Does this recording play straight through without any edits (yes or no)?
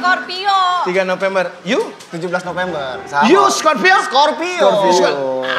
yes